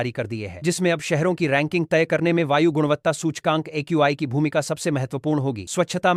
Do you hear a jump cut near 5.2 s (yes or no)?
no